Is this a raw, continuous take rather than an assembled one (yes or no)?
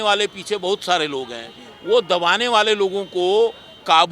yes